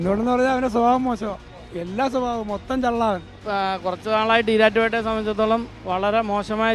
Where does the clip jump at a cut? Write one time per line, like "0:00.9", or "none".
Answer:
0:03.4